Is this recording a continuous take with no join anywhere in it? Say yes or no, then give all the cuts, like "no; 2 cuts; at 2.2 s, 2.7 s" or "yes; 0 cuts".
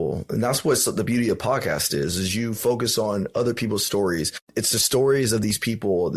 no; 1 cut; at 4.4 s